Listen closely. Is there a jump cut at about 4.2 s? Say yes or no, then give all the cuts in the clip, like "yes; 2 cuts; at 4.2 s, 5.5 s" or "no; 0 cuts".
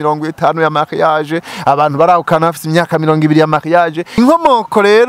yes; 1 cut; at 4.2 s